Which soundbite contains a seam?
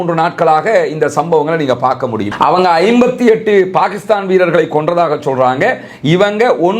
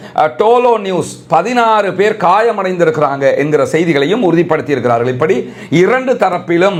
first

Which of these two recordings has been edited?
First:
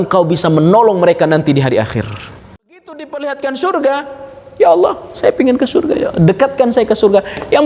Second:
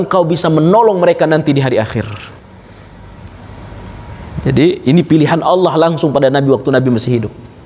first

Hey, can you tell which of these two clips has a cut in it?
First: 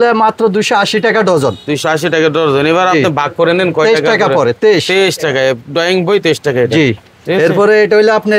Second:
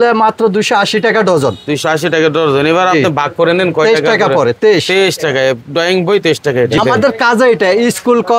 second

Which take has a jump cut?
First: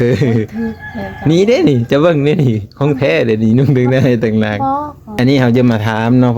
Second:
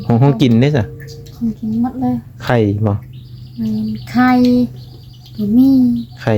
first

